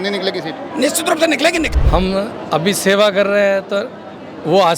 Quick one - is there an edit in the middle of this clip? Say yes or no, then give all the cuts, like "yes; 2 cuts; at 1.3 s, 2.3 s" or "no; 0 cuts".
yes; 1 cut; at 1.7 s